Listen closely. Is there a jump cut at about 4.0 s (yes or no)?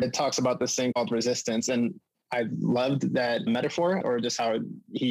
yes